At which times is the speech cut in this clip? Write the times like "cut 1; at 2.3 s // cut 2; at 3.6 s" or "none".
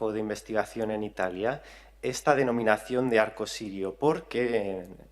cut 1; at 3.0 s